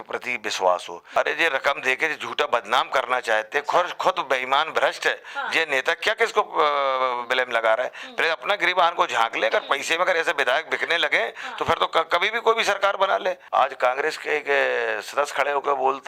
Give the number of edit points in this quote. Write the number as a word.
two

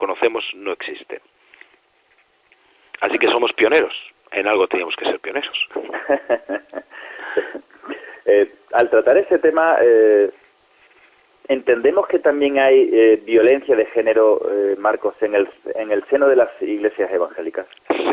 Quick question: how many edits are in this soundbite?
one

